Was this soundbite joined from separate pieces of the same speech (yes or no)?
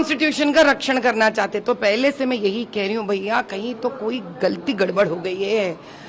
no